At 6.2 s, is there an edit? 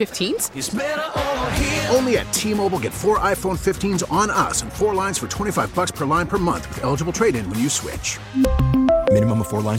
no; 0 cuts

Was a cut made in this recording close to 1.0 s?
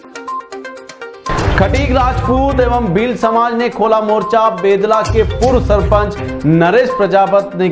yes; 1 cut; at 1.0 s

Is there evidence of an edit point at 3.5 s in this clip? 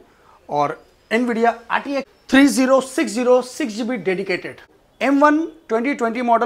no; 2 cuts; at 2.2 s, 4.8 s

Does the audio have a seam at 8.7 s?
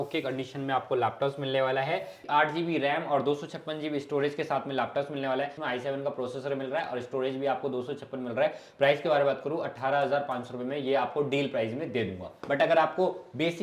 no; 3 cuts; at 2.1 s, 5.6 s, 12.3 s

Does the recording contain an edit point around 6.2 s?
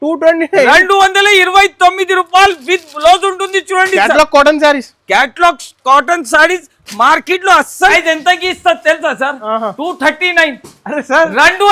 no; 1 cut; at 7.9 s

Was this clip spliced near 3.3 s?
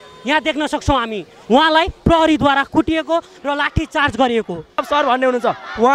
no; 1 cut; at 4.8 s

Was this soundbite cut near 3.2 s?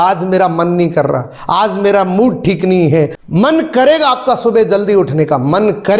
yes; 1 cut; at 3.2 s

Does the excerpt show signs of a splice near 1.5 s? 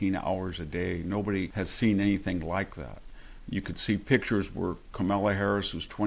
yes; 1 cut; at 1.5 s

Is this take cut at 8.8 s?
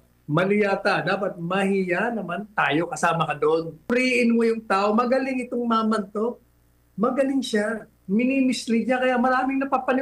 no; 1 cut; at 3.9 s

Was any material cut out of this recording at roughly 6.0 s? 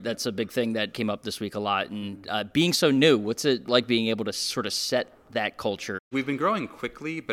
yes; 3 cuts; at 0.9 s, 3.7 s, 6.0 s

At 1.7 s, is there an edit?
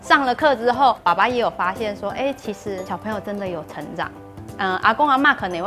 no; 1 cut; at 4.4 s

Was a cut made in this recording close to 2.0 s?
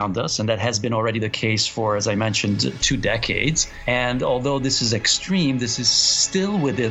no; 0 cuts

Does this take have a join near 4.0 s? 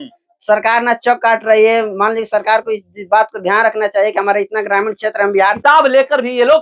no; 1 cut; at 5.6 s

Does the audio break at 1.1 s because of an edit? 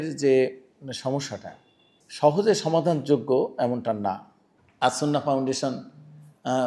no; 0 cuts

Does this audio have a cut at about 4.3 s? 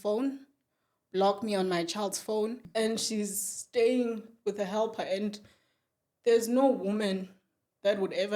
no; 1 cut; at 2.6 s

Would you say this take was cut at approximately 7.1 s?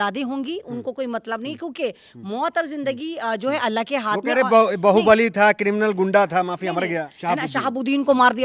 yes; 1 cut; at 7.1 s

